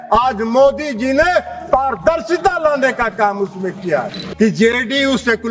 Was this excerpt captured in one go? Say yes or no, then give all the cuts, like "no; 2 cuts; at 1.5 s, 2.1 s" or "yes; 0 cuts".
no; 1 cut; at 4.2 s